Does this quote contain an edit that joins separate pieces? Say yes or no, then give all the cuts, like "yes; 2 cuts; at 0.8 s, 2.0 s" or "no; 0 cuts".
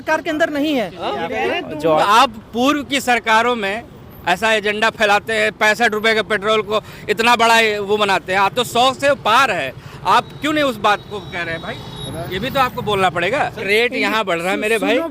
yes; 2 cuts; at 2.0 s, 13.6 s